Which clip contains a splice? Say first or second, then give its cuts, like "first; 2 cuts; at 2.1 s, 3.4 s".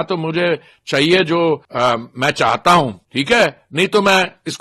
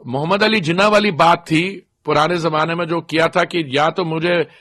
first; 2 cuts; at 1.7 s, 3.1 s